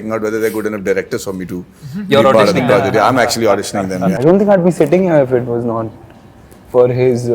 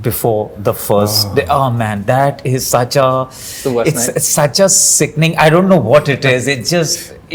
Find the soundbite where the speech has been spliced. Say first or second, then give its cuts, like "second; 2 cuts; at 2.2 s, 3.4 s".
first; 1 cut; at 4.2 s